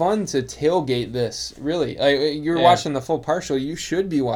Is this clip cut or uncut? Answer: uncut